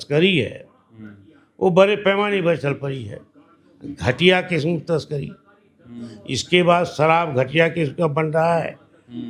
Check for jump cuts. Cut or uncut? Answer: uncut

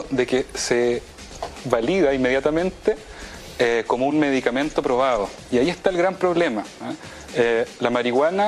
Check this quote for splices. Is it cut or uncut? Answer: cut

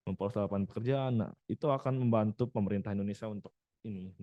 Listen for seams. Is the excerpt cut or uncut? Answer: uncut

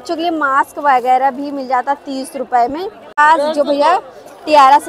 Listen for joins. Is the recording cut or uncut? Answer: cut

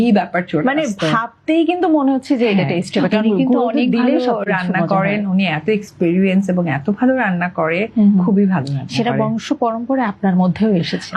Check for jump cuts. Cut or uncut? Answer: uncut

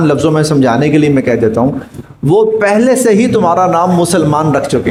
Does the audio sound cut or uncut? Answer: uncut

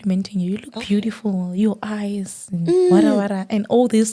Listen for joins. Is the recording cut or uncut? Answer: uncut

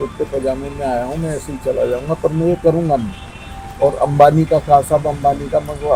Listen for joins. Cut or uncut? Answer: uncut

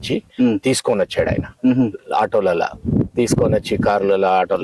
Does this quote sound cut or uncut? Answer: uncut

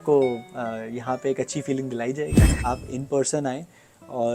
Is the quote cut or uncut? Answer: cut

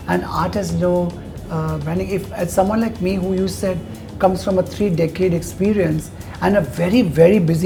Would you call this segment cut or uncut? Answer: uncut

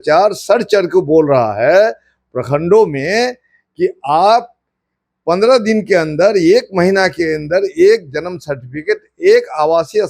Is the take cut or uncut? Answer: uncut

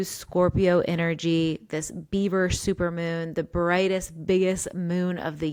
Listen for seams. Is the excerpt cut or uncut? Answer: uncut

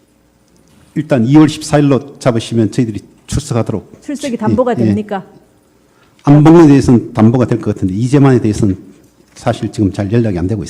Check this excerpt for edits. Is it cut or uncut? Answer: cut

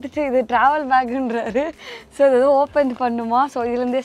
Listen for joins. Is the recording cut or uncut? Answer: uncut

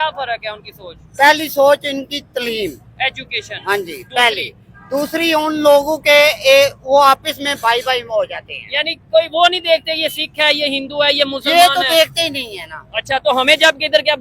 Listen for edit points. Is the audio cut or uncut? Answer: uncut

